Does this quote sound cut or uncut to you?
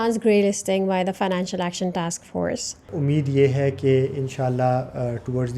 cut